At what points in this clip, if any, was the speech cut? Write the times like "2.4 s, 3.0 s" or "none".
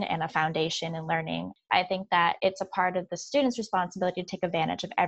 1.6 s